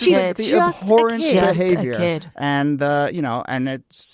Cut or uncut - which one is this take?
uncut